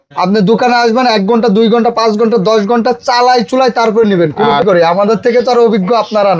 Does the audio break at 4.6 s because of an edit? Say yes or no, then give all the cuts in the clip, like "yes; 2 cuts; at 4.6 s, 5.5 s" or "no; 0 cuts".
yes; 1 cut; at 4.6 s